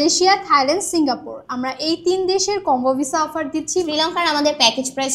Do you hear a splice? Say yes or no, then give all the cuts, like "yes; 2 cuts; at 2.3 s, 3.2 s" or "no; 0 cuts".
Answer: yes; 1 cut; at 3.8 s